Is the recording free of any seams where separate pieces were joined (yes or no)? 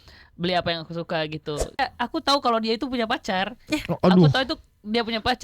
no